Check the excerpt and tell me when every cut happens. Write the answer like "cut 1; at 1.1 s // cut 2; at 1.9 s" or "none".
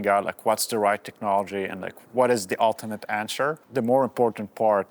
cut 1; at 1.9 s // cut 2; at 3.6 s